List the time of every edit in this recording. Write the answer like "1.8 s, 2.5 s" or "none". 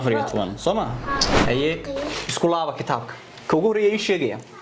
1.3 s